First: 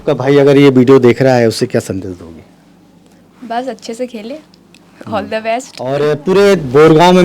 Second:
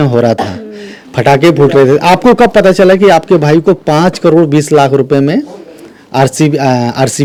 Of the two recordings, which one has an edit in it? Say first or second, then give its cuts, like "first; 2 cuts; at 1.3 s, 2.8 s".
first; 1 cut; at 5.8 s